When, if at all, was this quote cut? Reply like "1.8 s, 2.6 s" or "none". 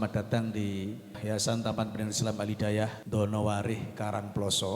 1.2 s, 3.0 s